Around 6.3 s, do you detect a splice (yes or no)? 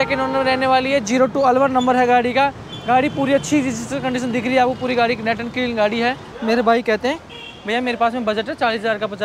yes